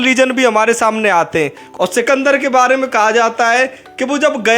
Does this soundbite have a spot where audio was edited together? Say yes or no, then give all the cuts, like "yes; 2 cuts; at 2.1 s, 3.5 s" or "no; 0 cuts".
yes; 1 cut; at 1.6 s